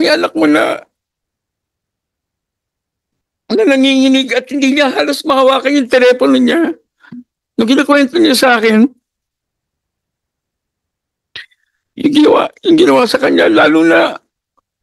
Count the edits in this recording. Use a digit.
0